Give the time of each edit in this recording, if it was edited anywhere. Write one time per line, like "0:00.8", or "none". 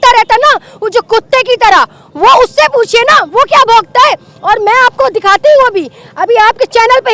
none